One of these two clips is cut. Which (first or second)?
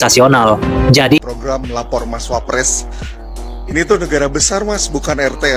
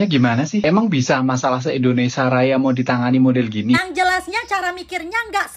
first